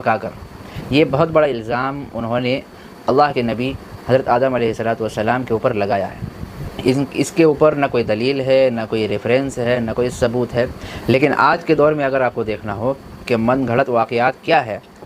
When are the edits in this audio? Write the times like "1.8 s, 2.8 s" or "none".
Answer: 10.9 s